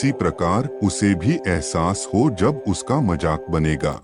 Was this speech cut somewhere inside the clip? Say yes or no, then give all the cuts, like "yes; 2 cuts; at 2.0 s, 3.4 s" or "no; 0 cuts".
no; 0 cuts